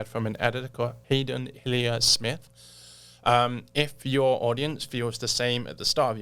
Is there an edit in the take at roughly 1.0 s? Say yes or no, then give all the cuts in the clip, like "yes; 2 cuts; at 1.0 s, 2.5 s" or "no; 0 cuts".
yes; 1 cut; at 1.0 s